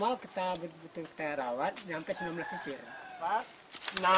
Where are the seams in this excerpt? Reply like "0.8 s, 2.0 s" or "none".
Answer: 3.1 s